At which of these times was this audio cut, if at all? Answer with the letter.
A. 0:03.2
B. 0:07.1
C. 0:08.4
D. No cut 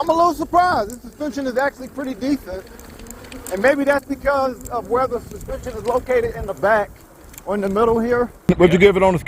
C